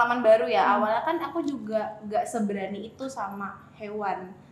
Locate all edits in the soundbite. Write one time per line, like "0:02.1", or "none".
none